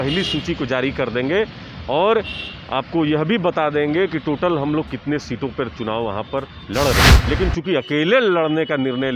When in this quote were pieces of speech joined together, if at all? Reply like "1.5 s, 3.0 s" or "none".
7.1 s